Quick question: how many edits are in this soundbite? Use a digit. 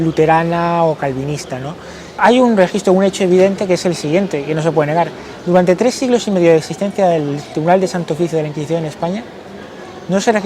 1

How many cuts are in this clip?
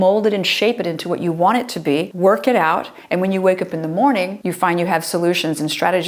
2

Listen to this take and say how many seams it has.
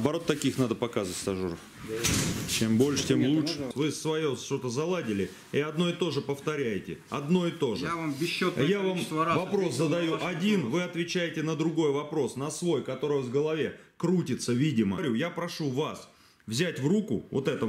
2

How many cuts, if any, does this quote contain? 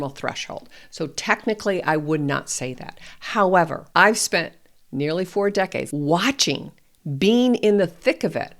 2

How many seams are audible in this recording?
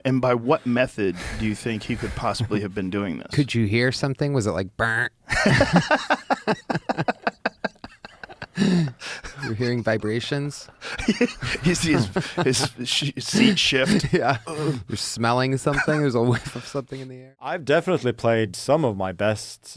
1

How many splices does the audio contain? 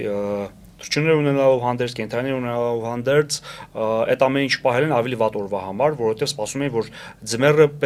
0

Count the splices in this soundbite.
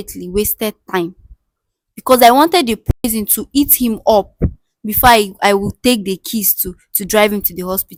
0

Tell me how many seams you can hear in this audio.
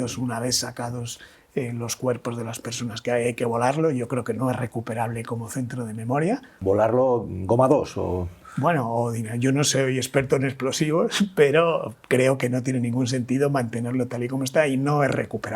1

